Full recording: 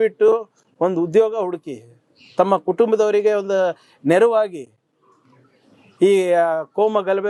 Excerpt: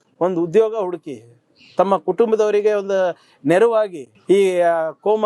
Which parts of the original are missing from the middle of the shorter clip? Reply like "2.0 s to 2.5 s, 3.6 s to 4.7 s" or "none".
4.7 s to 5.8 s